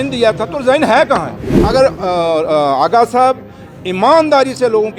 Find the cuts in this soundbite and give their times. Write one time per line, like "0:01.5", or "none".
0:01.5